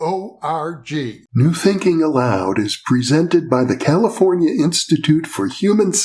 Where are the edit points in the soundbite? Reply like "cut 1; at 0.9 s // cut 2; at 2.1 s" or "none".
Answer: cut 1; at 1.2 s